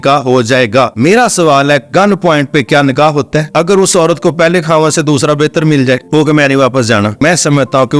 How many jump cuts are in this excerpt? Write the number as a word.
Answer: four